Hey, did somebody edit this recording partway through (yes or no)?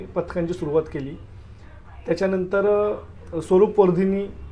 no